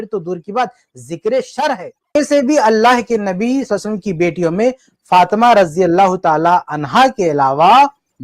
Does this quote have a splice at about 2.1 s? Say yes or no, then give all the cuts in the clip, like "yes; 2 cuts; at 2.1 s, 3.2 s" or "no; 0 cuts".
yes; 1 cut; at 2.1 s